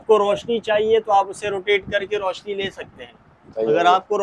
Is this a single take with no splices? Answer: yes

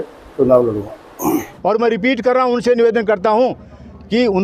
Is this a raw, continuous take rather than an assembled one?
no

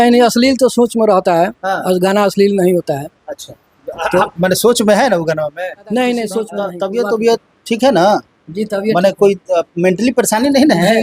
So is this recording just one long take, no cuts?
no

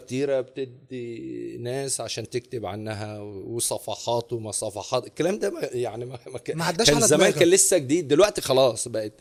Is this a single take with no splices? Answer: yes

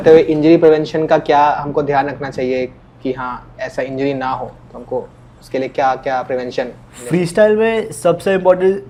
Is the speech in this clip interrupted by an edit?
no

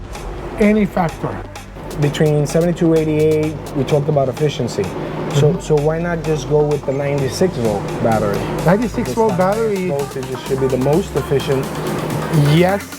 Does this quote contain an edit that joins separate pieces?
yes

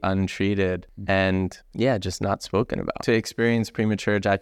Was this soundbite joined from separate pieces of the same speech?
yes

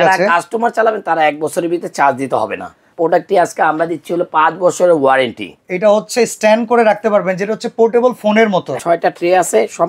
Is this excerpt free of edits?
no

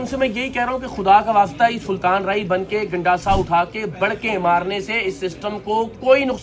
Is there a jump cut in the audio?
no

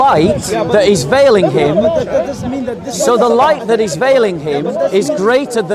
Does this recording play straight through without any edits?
yes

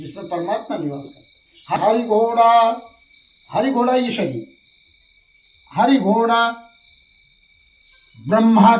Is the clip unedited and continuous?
no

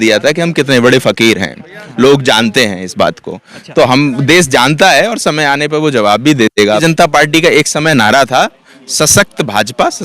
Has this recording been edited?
yes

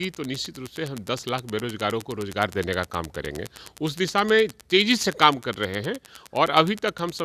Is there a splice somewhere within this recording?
no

